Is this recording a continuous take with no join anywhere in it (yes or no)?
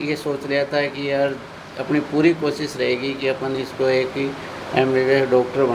yes